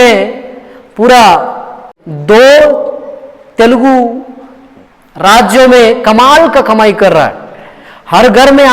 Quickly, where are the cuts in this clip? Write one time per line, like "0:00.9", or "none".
0:01.9